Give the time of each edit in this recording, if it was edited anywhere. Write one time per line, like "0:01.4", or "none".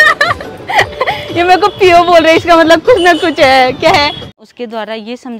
0:04.3